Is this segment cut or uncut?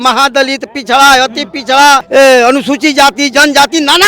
cut